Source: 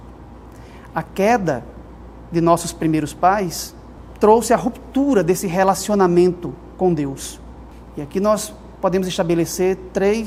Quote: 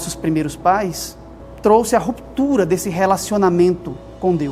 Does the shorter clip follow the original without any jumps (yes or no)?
yes